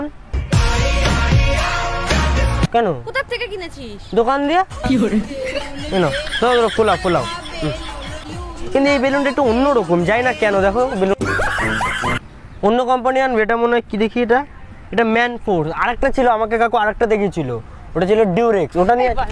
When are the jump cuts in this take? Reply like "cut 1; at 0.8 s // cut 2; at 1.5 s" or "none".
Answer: cut 1; at 2.7 s // cut 2; at 8.2 s // cut 3; at 12.2 s